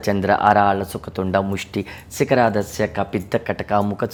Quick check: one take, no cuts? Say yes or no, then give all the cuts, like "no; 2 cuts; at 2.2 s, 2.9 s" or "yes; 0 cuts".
yes; 0 cuts